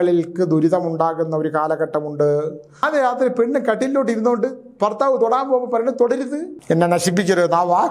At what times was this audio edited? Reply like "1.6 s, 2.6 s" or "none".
2.8 s, 6.5 s